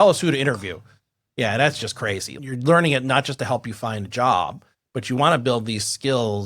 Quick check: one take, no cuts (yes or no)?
no